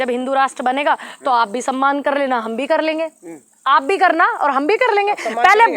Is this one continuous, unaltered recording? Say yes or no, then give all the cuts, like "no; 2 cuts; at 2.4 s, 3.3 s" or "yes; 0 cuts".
yes; 0 cuts